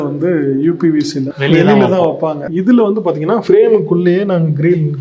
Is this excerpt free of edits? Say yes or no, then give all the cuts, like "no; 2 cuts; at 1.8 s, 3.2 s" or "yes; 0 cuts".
no; 1 cut; at 1.3 s